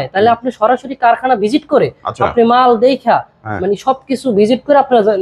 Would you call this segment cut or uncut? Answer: uncut